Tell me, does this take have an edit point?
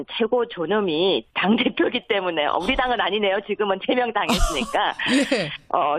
no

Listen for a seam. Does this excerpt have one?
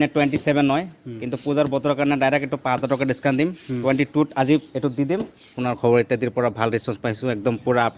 yes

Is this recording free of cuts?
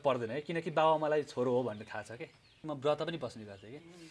no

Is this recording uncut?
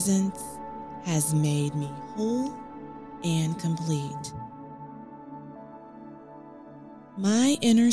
no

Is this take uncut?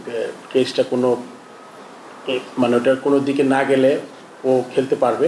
yes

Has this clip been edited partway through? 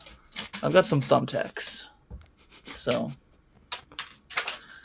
no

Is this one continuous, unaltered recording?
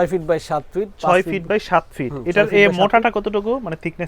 yes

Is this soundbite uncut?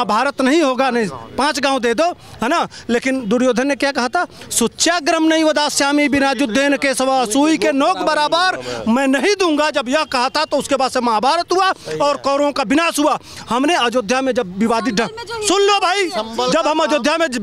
yes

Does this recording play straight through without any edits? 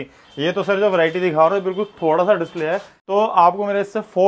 yes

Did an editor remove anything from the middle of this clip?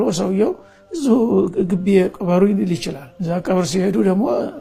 no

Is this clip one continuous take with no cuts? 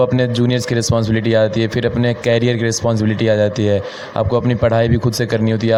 yes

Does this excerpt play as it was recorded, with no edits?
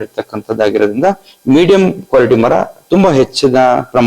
yes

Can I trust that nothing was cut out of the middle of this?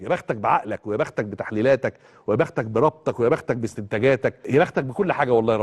no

